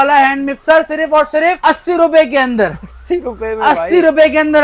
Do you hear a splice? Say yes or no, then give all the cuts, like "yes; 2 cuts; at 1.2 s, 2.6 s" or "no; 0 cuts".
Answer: no; 0 cuts